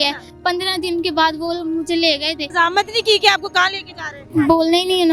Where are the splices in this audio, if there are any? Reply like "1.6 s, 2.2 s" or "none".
2.4 s, 4.2 s